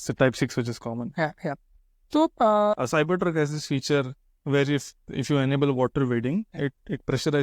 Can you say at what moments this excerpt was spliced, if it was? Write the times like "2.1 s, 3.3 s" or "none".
2.7 s